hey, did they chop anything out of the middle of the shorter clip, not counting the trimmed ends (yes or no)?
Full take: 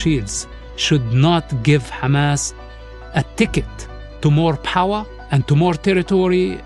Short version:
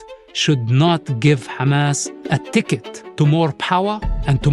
yes